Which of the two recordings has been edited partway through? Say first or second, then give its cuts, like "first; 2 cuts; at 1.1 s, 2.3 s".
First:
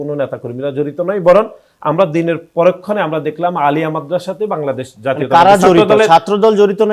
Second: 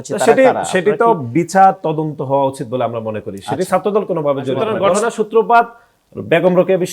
second; 1 cut; at 4.7 s